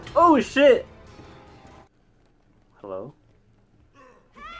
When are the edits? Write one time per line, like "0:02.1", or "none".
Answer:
0:01.6